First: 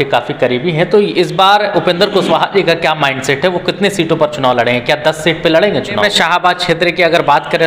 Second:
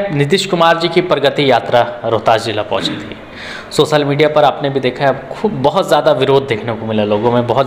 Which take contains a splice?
first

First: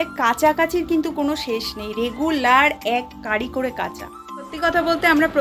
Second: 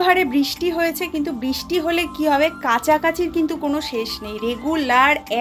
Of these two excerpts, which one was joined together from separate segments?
first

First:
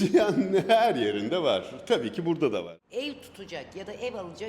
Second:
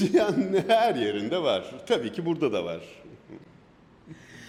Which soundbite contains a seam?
first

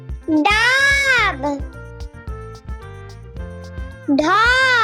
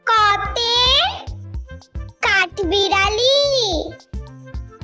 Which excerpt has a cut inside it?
first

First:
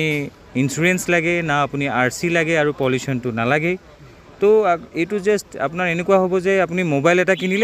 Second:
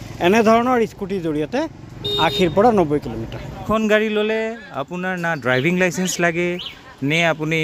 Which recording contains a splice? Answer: second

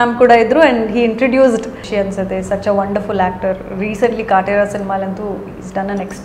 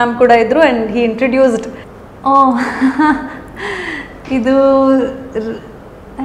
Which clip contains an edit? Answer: first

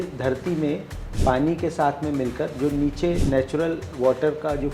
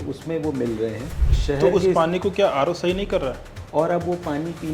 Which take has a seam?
second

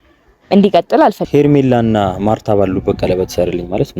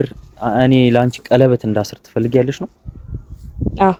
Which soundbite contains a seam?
first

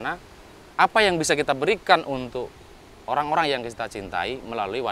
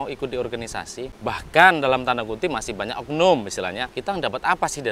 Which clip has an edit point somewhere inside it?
second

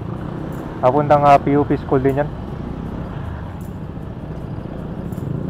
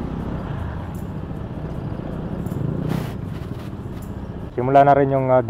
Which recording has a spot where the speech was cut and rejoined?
second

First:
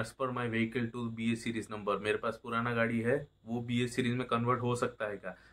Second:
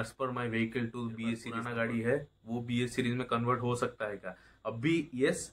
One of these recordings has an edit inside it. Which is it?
second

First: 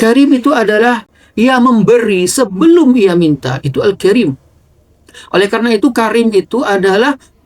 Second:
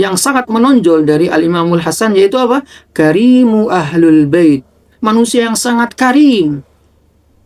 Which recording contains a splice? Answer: first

